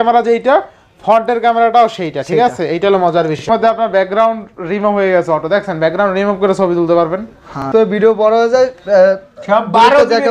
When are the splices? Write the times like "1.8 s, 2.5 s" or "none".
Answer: 3.4 s, 7.7 s